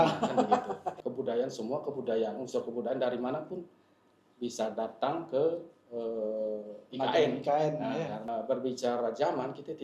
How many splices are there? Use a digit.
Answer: 2